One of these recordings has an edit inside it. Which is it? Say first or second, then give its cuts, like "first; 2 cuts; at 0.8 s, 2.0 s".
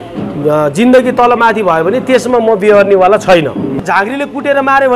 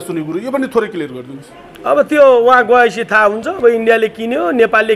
first; 1 cut; at 3.7 s